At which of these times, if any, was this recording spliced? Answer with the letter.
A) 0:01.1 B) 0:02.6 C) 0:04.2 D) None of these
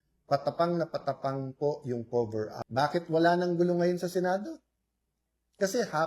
B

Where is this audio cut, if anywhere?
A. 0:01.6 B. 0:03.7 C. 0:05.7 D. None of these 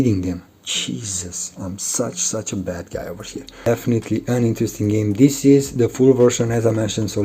B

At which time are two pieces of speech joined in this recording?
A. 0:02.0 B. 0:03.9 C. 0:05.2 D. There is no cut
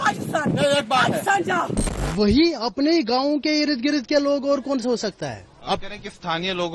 A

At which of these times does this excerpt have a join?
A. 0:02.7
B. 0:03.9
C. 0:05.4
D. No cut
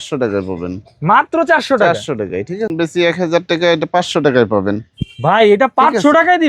A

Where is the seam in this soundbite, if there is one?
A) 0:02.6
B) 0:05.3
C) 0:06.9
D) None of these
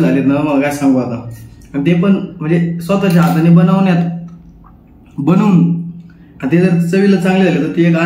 D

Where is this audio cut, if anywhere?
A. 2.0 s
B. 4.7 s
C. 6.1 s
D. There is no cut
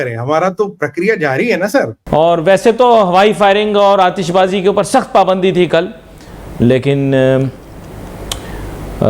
A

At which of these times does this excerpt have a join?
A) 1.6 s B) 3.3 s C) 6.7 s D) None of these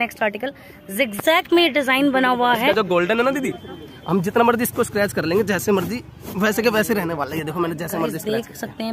D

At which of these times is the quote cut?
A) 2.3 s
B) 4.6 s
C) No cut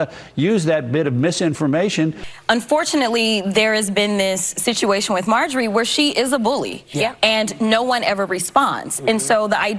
A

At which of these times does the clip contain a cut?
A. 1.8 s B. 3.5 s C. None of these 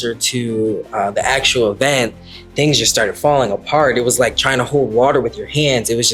C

